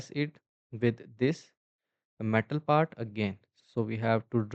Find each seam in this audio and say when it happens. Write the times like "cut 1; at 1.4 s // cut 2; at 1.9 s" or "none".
cut 1; at 3.6 s